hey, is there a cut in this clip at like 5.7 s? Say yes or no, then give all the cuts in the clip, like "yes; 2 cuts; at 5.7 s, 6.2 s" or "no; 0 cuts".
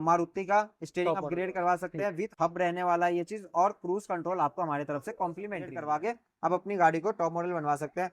yes; 1 cut; at 5.7 s